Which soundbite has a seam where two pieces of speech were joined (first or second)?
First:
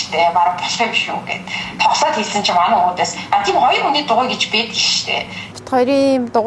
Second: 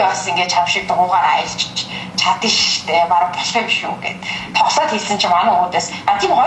first